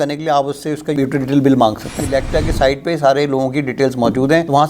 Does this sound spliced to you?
yes; 2 cuts; at 0.9 s, 1.9 s

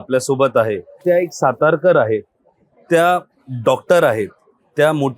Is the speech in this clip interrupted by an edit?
yes; 1 cut; at 1.0 s

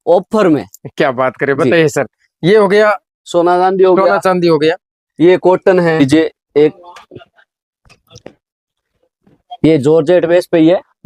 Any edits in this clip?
yes; 1 cut; at 6.0 s

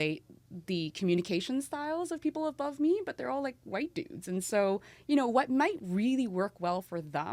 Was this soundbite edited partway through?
no; 0 cuts

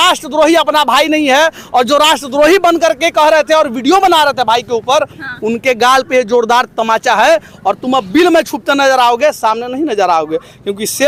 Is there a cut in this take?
no; 0 cuts

